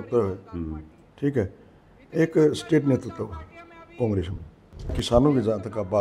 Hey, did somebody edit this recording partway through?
yes; 1 cut; at 5.0 s

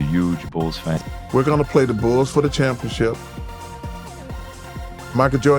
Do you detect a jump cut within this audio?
yes; 1 cut; at 1.0 s

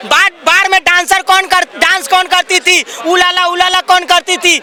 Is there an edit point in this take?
no; 0 cuts

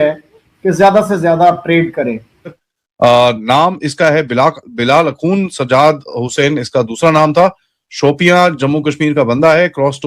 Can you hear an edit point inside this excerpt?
yes; 2 cuts; at 2.6 s, 4.8 s

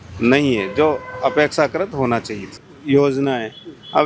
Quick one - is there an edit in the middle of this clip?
yes; 1 cut; at 2.7 s

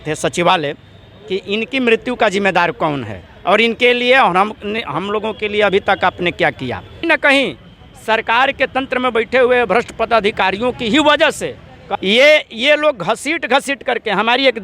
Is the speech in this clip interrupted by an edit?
yes; 2 cuts; at 7.0 s, 11.8 s

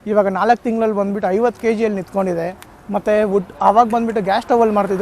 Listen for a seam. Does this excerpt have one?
no; 0 cuts

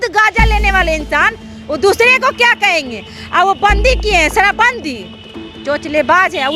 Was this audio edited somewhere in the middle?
no; 0 cuts

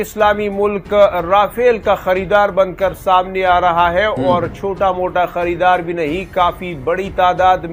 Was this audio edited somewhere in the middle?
no; 0 cuts

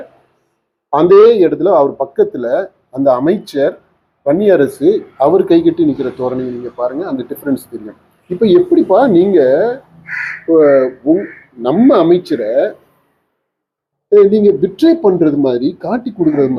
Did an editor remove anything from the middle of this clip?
no; 0 cuts

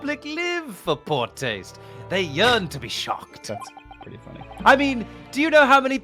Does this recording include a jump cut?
yes; 1 cut; at 4.6 s

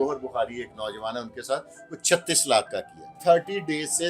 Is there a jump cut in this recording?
yes; 1 cut; at 3.1 s

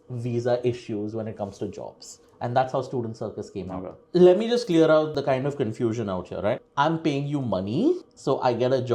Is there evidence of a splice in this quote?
yes; 3 cuts; at 3.8 s, 5.1 s, 6.7 s

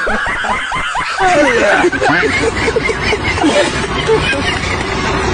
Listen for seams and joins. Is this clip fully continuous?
yes; 0 cuts

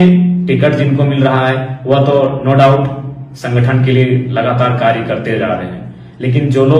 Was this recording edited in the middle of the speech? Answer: no; 0 cuts

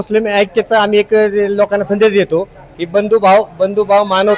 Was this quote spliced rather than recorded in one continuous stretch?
no; 0 cuts

